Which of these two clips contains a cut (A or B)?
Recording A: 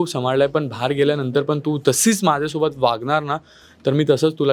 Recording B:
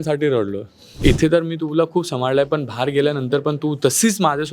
B